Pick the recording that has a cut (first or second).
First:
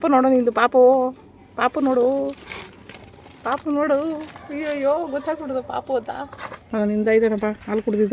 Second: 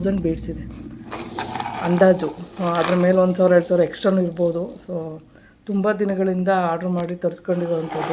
first